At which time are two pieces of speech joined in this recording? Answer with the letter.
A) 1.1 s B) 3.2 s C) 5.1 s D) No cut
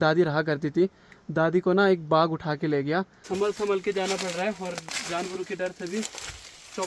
B